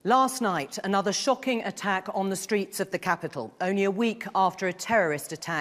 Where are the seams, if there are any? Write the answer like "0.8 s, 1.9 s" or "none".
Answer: 1.9 s